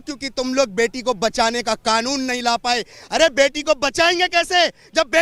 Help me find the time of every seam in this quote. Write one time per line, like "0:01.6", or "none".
none